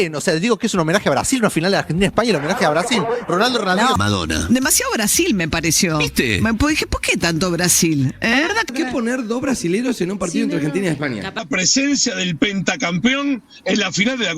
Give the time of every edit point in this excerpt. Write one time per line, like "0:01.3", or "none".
0:04.0
0:08.7
0:11.4